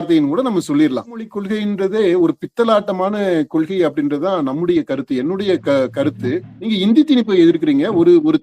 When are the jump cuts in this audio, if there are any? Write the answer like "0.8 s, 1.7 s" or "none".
1.3 s, 6.5 s